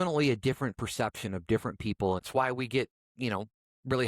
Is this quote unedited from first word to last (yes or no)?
no